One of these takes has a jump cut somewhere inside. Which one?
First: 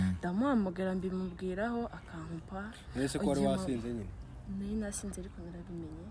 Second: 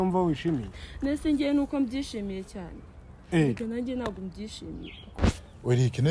second; 1 cut; at 5.2 s

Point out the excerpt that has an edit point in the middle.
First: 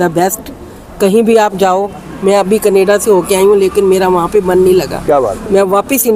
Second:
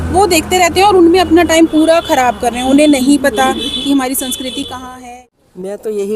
second; 1 cut; at 5.1 s

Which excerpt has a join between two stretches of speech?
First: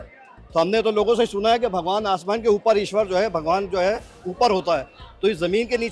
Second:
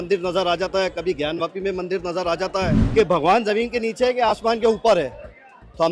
second; 1 cut; at 2.8 s

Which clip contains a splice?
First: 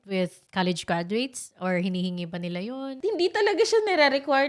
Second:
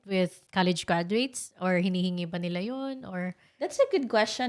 first; 1 cut; at 3.0 s

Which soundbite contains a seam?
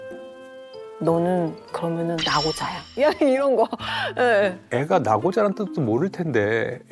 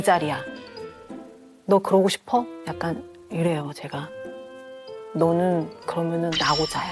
first; 1 cut; at 4.6 s

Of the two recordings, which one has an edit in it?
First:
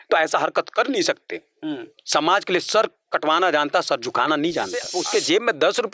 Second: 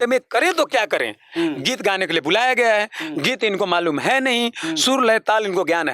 first; 1 cut; at 4.9 s

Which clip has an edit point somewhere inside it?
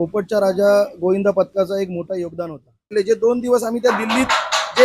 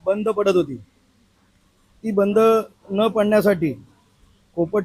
first; 1 cut; at 2.9 s

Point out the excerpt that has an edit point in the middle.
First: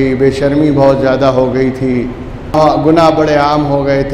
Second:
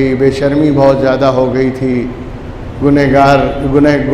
first; 1 cut; at 2.6 s

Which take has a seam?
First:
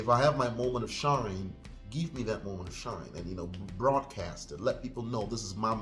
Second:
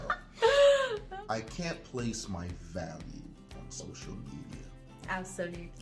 second; 1 cut; at 1.0 s

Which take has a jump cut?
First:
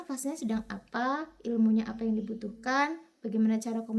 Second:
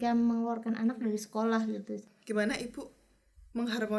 second; 1 cut; at 2.0 s

